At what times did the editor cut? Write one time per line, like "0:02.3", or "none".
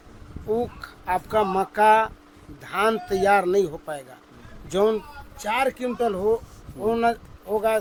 none

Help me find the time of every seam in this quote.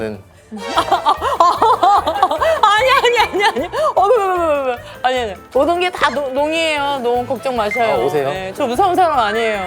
0:05.4
0:08.5

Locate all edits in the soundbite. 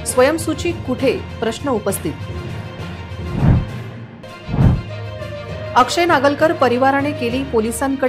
none

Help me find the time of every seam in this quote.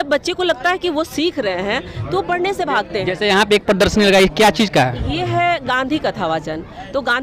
none

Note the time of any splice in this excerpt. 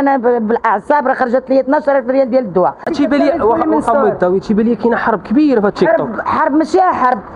0:02.8

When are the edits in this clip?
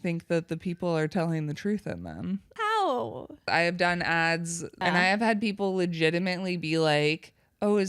0:02.6
0:03.5
0:04.8

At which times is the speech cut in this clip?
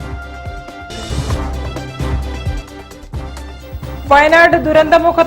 0:03.2

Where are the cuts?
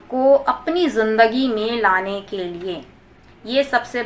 none

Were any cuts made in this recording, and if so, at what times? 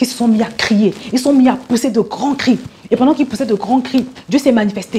none

